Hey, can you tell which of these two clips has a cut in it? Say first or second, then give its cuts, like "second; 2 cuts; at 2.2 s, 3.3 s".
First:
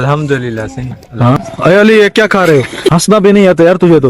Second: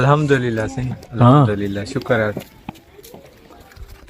first; 2 cuts; at 1.4 s, 2.9 s